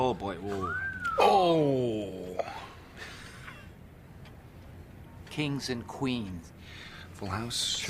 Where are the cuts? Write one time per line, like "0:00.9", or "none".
0:05.7

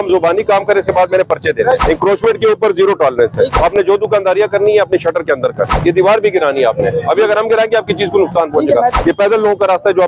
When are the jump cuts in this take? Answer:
0:01.8
0:03.5
0:05.7
0:09.0

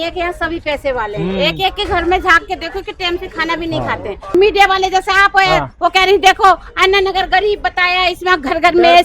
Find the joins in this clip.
0:04.3

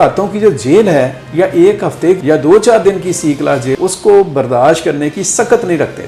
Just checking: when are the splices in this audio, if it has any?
none

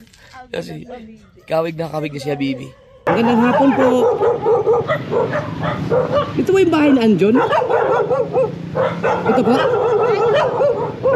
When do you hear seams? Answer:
0:03.0

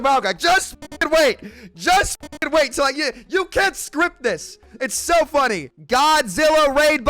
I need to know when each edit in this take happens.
0:05.7

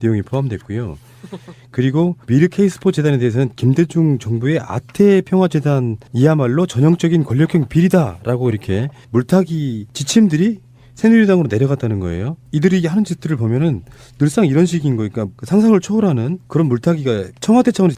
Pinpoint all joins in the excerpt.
0:16.8

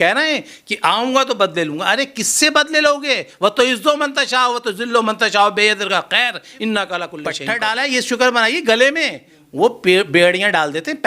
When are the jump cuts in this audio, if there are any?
0:07.2

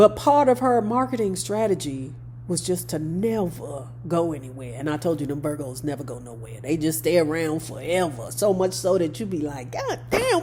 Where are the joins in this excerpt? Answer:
none

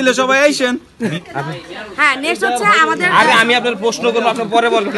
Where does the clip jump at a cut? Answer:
0:01.2

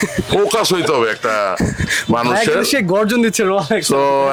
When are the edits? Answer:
none

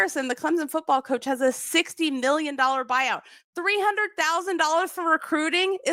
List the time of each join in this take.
none

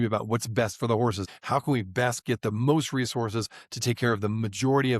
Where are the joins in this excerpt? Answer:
0:01.3

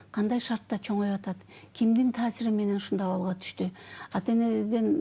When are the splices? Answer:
none

